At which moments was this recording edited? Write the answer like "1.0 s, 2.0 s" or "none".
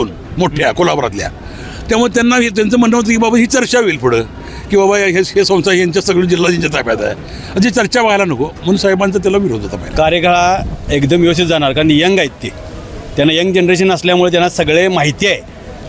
9.8 s